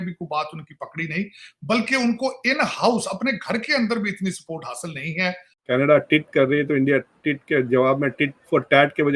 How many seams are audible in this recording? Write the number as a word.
one